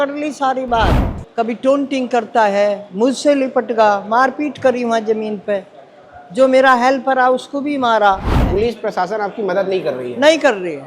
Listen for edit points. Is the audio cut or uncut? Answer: cut